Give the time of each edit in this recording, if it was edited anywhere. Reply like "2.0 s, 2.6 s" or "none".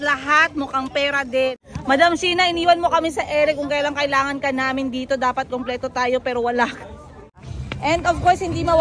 1.7 s, 7.4 s